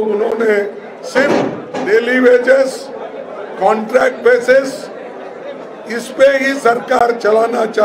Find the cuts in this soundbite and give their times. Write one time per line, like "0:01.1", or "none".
0:01.6